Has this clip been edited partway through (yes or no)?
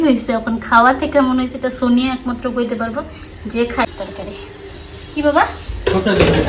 yes